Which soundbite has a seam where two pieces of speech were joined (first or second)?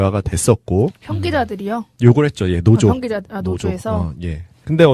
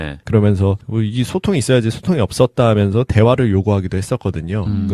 second